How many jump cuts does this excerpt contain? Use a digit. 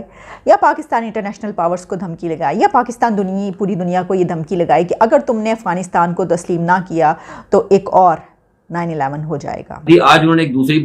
1